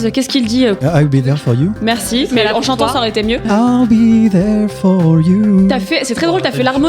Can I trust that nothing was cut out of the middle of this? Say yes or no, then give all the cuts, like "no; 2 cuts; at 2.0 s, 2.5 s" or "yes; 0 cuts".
no; 2 cuts; at 0.8 s, 3.5 s